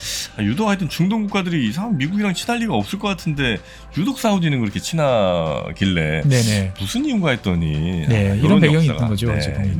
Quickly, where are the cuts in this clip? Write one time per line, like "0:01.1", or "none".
none